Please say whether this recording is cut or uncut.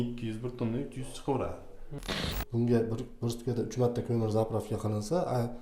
cut